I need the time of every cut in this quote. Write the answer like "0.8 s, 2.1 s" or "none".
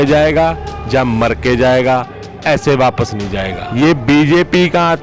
3.6 s